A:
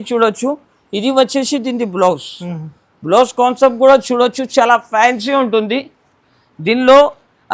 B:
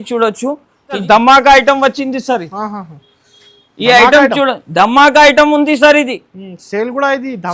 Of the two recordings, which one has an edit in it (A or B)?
B